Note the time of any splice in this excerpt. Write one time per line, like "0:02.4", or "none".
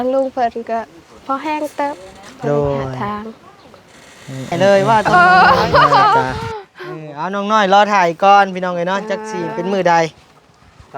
0:04.5

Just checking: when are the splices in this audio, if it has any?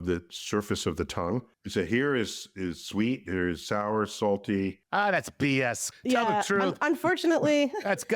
0:01.5
0:04.8
0:05.9

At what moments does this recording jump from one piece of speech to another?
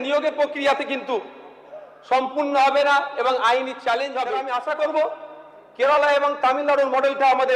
0:04.4

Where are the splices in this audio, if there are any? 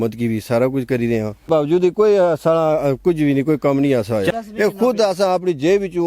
0:01.5
0:04.3

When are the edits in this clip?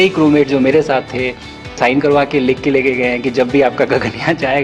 0:01.7

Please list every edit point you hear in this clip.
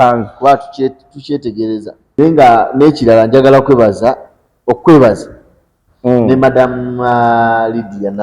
0:02.2

